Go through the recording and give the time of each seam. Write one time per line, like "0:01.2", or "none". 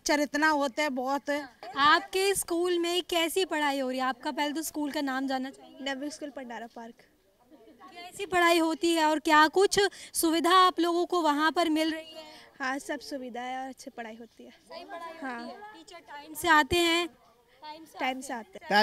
0:01.6